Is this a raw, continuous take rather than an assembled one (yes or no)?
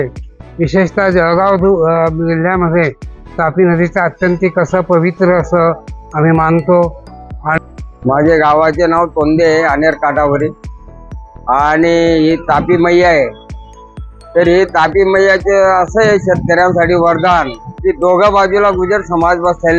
no